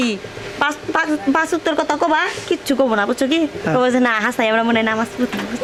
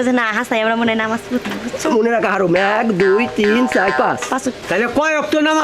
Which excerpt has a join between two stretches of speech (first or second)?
second